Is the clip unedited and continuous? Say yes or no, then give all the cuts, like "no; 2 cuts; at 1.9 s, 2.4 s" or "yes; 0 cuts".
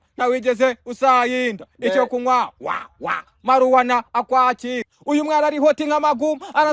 no; 1 cut; at 4.9 s